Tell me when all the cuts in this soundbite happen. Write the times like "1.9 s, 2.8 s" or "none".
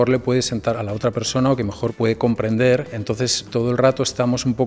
0.7 s, 1.9 s, 3.4 s